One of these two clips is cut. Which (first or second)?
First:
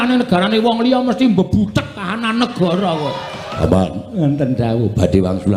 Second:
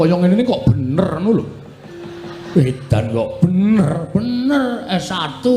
first